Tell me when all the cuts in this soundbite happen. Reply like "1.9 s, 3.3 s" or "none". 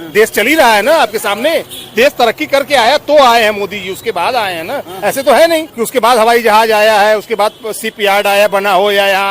1.7 s, 5.8 s